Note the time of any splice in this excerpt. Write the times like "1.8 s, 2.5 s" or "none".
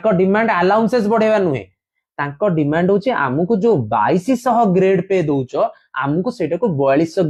none